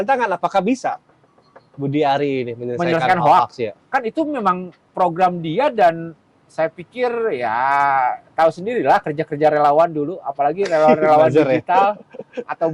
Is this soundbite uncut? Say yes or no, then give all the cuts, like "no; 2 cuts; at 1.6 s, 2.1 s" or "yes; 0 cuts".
yes; 0 cuts